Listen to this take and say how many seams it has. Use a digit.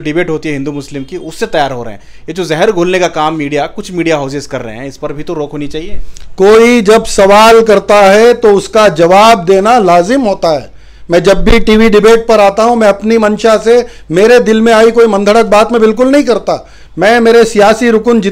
0